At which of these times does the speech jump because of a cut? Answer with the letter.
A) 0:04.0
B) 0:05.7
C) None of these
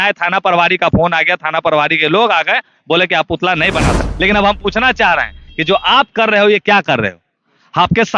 A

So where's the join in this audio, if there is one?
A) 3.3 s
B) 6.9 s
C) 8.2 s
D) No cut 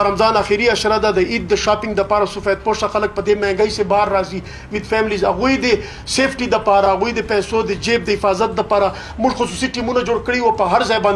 B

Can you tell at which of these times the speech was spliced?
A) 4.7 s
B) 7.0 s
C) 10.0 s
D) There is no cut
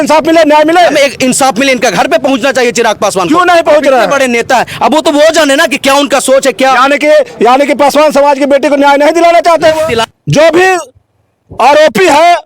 C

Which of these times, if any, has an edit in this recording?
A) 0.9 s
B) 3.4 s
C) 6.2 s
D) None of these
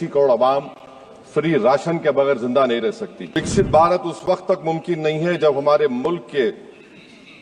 B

